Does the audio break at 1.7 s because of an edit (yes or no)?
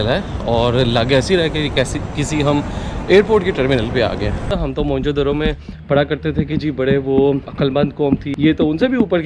no